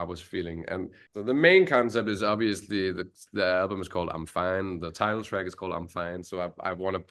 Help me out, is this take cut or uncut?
cut